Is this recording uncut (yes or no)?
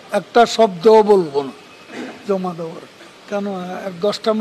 no